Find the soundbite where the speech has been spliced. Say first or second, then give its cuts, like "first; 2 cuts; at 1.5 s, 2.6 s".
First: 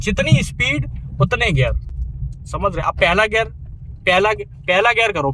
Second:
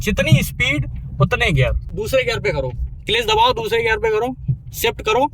second; 1 cut; at 1.8 s